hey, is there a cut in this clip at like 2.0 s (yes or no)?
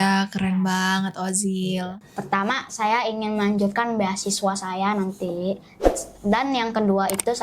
yes